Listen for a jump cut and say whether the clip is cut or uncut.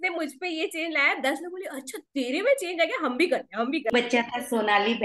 cut